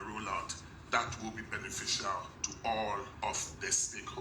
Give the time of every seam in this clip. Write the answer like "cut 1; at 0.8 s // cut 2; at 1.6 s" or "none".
cut 1; at 2.4 s // cut 2; at 3.1 s